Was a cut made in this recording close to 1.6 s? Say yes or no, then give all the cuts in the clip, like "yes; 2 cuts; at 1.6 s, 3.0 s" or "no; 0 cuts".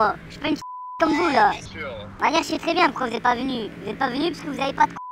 no; 0 cuts